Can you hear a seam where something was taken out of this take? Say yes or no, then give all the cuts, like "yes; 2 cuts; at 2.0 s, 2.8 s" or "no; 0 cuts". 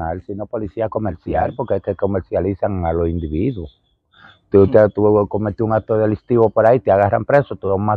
yes; 1 cut; at 1.5 s